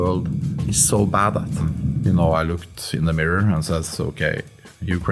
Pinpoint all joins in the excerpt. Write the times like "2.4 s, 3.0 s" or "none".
2.0 s